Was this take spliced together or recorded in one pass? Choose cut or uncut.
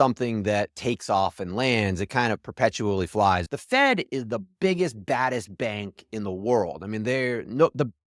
cut